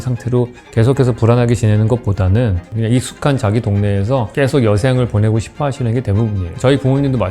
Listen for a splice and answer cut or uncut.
cut